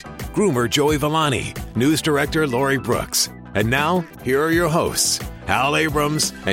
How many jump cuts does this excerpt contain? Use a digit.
1